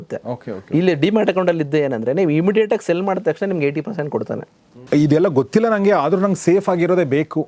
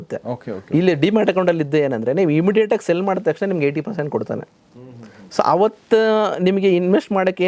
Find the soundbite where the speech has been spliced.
first; 1 cut; at 4.7 s

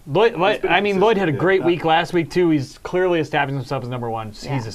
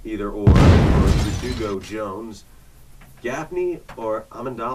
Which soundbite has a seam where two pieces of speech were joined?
first; 1 cut; at 3.6 s

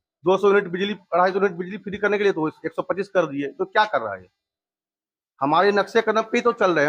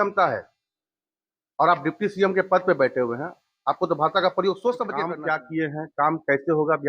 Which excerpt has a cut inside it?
second; 1 cut; at 5.1 s

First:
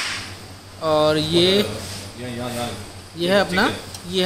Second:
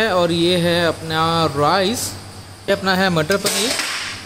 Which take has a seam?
second; 1 cut; at 2.7 s

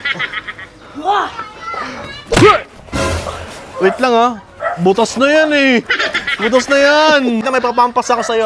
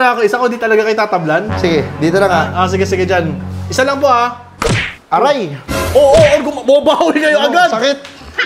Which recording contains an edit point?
first; 1 cut; at 7.5 s

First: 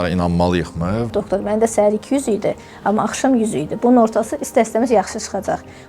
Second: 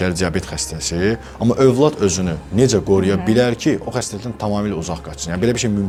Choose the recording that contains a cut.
first; 1 cut; at 1.1 s

